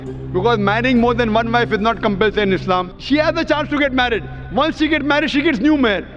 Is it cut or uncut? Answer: cut